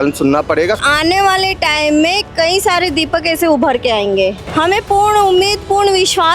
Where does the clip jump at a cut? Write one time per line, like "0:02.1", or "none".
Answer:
0:00.8
0:04.4